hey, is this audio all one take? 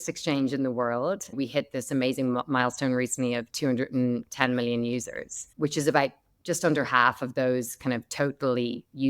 no; 1 cut; at 1.4 s

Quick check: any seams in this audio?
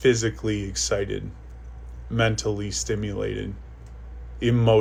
no; 0 cuts

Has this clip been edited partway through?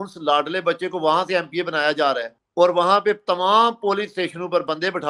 no; 0 cuts

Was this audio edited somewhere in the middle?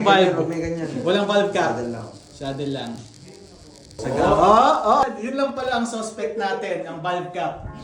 yes; 2 cuts; at 3.9 s, 5.0 s

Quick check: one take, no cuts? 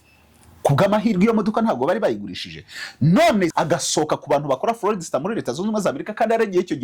no; 1 cut; at 3.5 s

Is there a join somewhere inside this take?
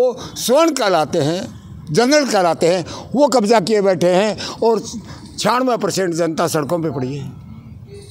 no; 0 cuts

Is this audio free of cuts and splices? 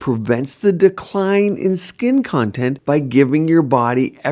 no; 1 cut; at 2.8 s

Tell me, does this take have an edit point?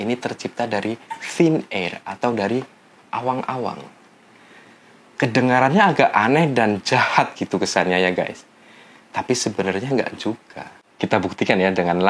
no; 0 cuts

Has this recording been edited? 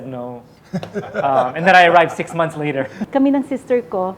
yes; 1 cut; at 2.9 s

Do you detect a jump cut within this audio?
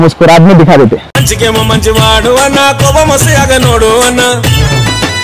no; 0 cuts

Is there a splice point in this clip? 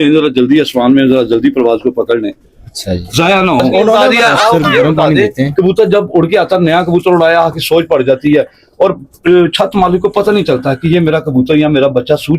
yes; 1 cut; at 3.7 s

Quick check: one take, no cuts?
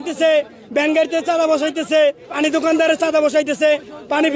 no; 1 cut; at 2.3 s

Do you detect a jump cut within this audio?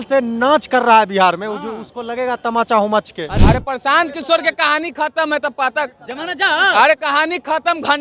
yes; 1 cut; at 3.3 s

